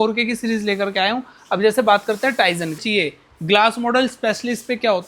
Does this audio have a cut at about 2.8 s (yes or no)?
yes